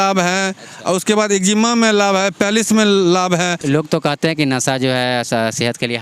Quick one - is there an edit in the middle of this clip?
yes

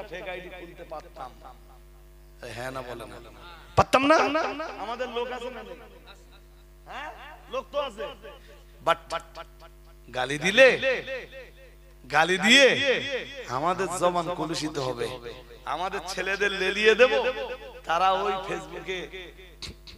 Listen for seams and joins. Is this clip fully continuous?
yes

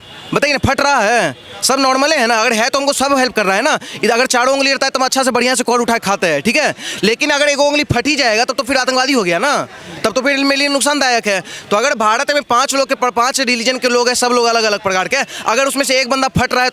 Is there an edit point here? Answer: no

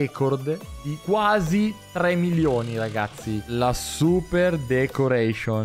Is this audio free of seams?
no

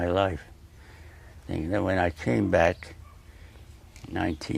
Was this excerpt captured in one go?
no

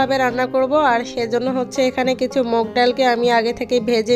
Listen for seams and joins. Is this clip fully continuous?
yes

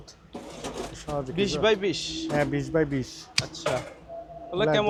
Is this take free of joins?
yes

